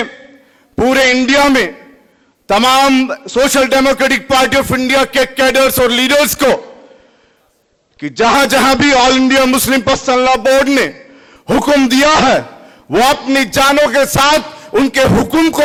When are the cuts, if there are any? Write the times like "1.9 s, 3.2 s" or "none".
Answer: none

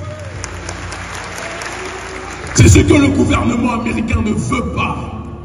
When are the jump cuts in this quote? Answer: 2.4 s

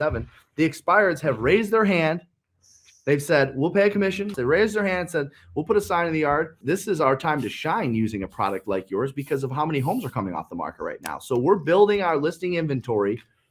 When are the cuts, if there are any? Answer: 4.3 s, 6.6 s

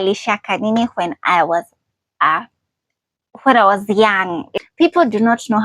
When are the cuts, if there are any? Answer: 4.4 s

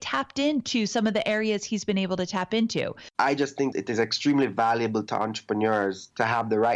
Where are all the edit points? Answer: 3.1 s

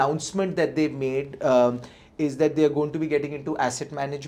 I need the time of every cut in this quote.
none

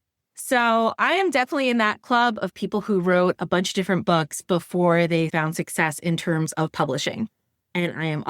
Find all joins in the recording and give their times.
5.3 s

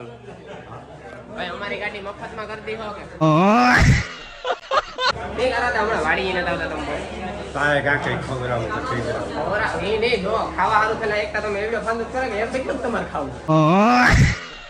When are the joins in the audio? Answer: 3.2 s, 5.1 s, 13.5 s

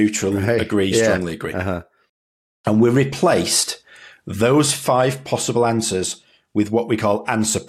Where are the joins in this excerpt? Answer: none

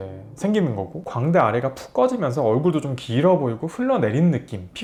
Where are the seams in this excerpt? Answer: none

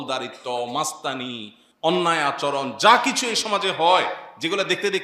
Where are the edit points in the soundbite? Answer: none

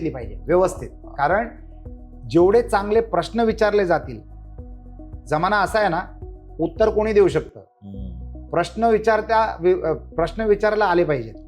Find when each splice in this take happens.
none

